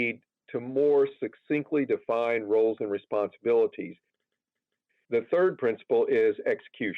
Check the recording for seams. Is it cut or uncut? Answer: cut